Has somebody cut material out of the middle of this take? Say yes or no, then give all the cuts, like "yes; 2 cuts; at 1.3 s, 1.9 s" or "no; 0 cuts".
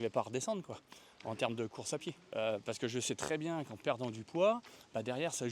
yes; 1 cut; at 2.2 s